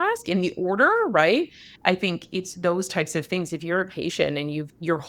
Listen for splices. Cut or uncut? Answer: cut